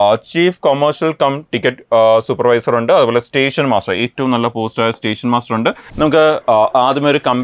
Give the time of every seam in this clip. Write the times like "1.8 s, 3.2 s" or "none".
5.8 s